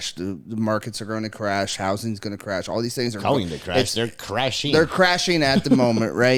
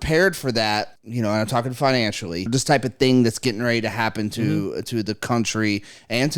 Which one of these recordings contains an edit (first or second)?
second